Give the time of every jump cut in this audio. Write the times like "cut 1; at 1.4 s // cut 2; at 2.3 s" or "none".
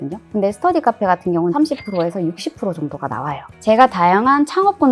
cut 1; at 1.5 s // cut 2; at 3.5 s